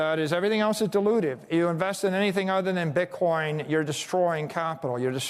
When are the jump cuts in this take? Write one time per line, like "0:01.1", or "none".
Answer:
none